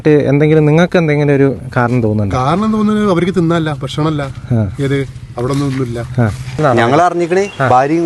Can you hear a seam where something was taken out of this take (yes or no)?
yes